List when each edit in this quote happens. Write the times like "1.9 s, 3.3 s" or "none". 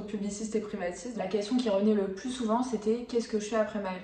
1.1 s